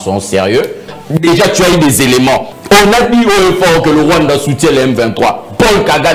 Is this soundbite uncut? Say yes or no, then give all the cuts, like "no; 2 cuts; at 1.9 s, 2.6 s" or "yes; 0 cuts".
no; 2 cuts; at 0.9 s, 2.5 s